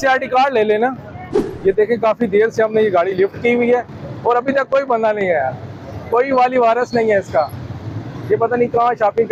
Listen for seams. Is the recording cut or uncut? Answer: uncut